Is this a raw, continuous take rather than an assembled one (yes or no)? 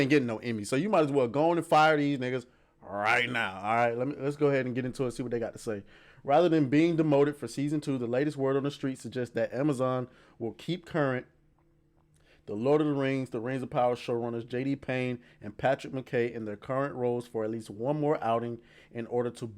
yes